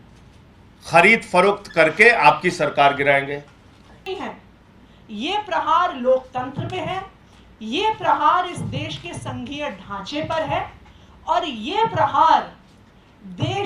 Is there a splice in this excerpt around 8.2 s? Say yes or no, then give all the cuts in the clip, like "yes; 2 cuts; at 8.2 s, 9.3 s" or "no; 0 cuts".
no; 1 cut; at 4.1 s